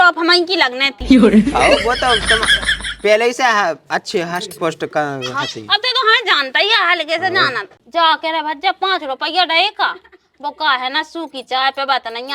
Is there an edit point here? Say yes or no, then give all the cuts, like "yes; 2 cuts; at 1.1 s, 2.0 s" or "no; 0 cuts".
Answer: no; 0 cuts